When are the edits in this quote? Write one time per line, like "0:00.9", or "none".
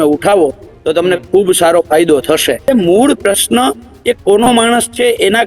0:02.6